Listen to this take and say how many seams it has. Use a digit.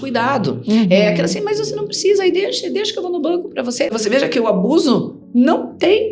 1